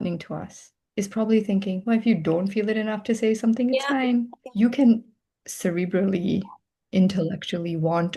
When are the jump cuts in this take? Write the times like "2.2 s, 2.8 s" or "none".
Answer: 4.4 s